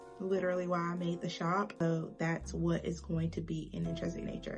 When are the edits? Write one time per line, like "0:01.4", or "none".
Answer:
0:01.8